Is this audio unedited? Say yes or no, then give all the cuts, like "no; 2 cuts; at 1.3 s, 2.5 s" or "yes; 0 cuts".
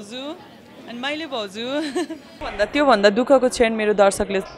no; 1 cut; at 2.5 s